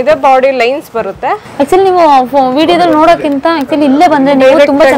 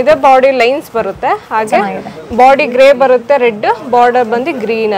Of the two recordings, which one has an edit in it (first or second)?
first